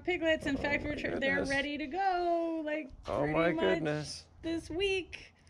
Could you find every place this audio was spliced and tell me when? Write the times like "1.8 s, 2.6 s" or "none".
none